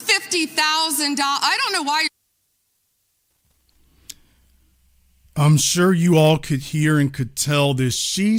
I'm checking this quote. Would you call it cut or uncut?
uncut